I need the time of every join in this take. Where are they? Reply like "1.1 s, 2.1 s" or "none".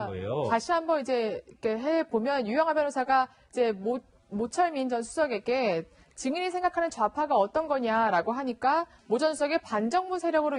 6.2 s